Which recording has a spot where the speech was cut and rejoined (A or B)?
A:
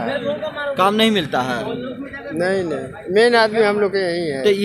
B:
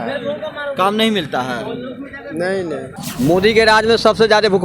B